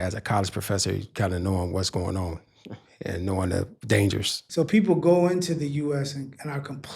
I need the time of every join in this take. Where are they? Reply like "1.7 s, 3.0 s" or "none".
4.4 s